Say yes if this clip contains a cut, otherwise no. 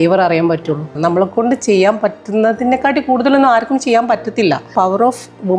yes